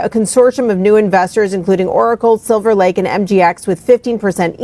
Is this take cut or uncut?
cut